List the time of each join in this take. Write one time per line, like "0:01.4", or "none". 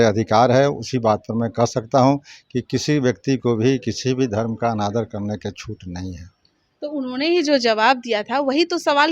none

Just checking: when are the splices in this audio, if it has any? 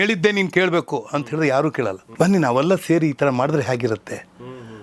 0:02.0

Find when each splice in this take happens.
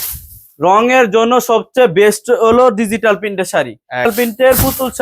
0:04.1

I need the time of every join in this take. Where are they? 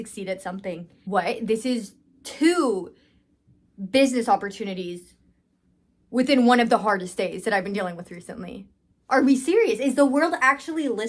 0:00.9

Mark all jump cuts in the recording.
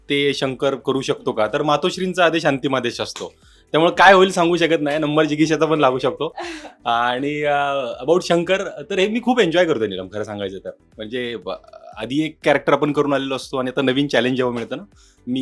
none

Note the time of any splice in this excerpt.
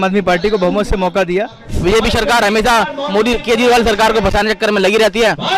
0:01.8

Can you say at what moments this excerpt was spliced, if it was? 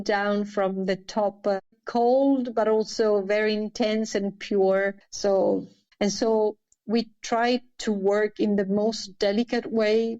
0:01.6
0:05.9

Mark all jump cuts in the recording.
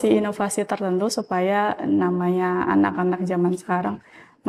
none

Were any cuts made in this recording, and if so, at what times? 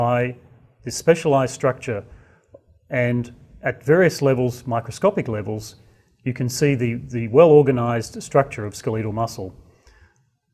none

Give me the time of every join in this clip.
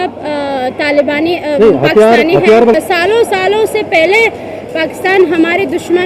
0:02.7

